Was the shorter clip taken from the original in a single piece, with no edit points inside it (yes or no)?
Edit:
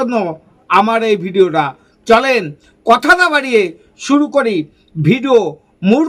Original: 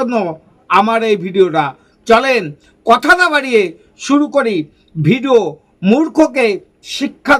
yes